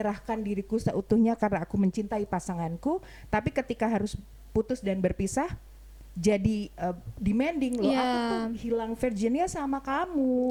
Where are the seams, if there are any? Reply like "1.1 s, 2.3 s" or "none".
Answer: none